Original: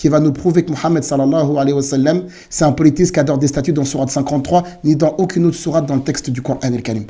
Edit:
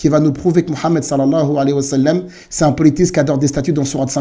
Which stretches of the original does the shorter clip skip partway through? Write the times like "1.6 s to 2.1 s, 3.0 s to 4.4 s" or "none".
none